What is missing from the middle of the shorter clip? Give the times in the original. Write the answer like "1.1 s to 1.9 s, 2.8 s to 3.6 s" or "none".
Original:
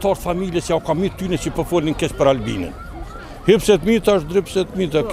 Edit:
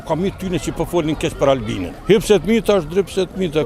2.6 s to 3.2 s